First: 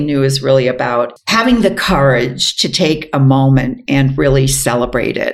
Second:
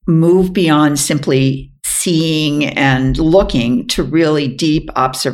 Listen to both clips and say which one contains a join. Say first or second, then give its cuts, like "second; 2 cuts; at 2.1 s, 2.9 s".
first; 1 cut; at 1.1 s